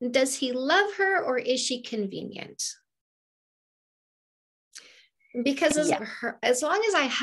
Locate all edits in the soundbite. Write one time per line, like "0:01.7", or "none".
0:06.0